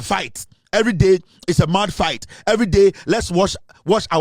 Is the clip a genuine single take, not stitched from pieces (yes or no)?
yes